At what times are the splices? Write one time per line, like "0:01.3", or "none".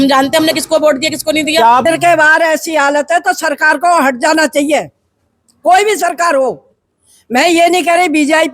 0:01.8